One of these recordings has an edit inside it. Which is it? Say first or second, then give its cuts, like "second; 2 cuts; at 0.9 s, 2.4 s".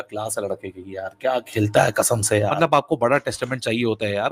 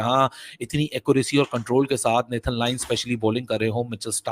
first; 1 cut; at 2.5 s